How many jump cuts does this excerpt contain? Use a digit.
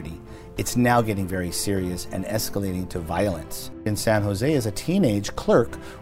1